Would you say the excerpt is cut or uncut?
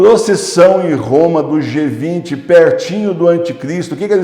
uncut